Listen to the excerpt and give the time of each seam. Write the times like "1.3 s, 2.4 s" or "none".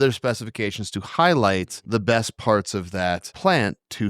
1.7 s, 3.3 s

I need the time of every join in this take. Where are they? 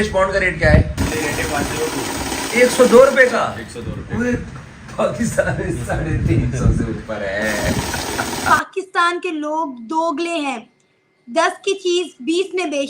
1.0 s, 8.5 s

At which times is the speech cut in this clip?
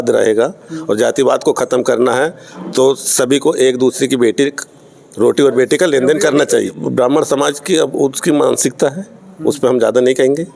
6.8 s

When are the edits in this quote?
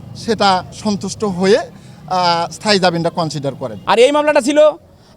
3.7 s

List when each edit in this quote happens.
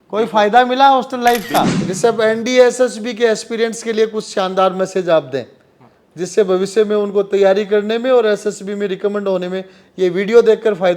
1.8 s

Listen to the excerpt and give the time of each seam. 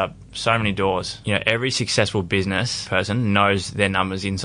1.1 s, 2.8 s

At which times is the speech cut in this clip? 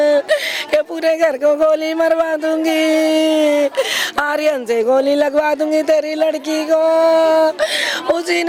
none

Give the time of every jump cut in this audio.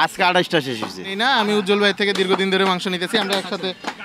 1.1 s

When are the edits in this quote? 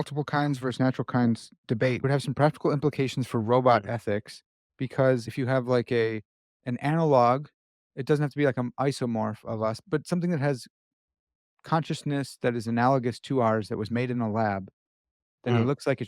2.0 s, 5.3 s, 9.8 s

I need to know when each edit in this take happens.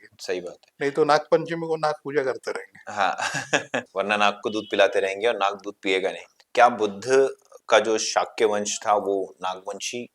3.9 s, 6.3 s

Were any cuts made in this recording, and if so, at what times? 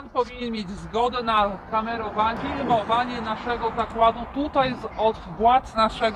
2.3 s

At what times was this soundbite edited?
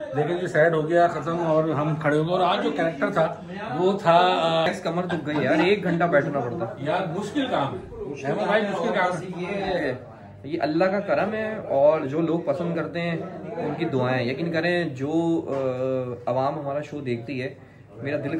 4.7 s

